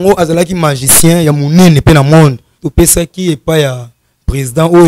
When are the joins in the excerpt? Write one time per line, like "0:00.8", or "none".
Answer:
0:02.6